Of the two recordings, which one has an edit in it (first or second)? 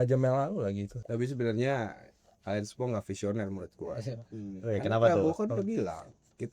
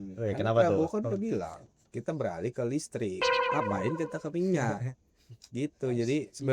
first